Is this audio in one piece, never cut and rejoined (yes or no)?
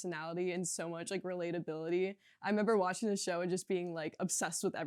yes